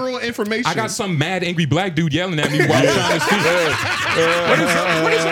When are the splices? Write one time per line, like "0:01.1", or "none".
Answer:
none